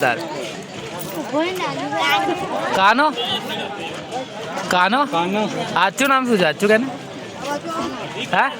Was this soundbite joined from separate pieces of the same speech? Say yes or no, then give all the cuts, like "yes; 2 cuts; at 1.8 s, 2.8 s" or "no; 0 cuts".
no; 0 cuts